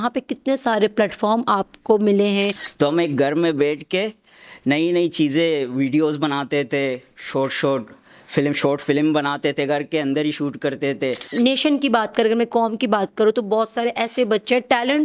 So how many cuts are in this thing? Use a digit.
2